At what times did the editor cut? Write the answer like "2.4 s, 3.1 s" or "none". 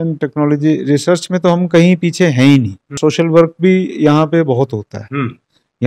2.9 s